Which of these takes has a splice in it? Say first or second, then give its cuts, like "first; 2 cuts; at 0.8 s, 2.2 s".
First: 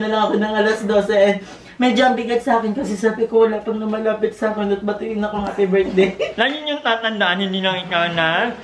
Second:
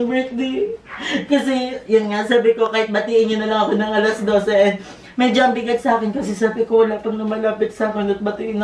first; 1 cut; at 6.3 s